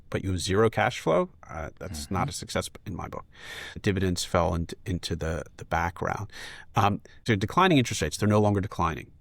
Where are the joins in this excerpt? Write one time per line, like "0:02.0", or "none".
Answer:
0:03.8
0:07.1